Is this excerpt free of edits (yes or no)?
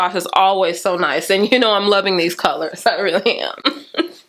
yes